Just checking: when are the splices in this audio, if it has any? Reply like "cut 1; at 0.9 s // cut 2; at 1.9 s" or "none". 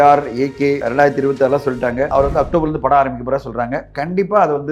cut 1; at 0.8 s // cut 2; at 2.1 s